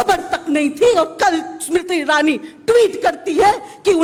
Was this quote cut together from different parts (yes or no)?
no